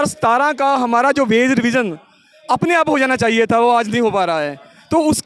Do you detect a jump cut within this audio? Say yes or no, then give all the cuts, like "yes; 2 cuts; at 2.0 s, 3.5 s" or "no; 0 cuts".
no; 0 cuts